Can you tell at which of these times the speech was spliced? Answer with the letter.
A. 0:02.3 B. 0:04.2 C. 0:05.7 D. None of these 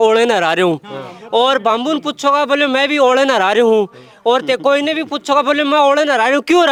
D